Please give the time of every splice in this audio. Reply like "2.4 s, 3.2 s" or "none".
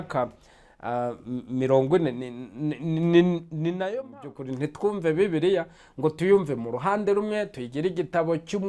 3.9 s

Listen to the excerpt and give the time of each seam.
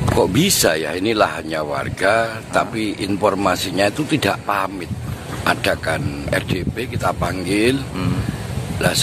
4.9 s

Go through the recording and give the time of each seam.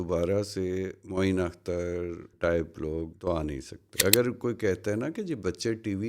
3.8 s

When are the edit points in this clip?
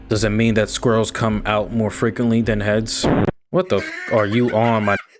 none

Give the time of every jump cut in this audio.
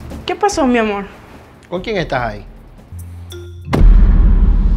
3.0 s

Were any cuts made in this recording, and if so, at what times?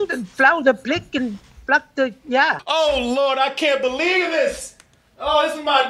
2.6 s

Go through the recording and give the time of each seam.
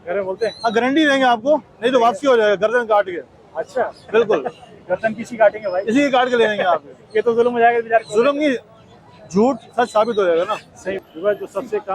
11.0 s

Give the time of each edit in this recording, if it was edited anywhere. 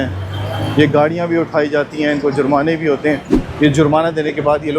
3.4 s

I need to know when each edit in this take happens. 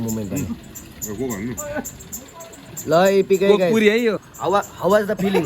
4.3 s

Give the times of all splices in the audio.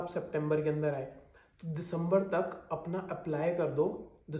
none

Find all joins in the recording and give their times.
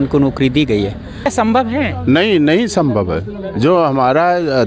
1.3 s

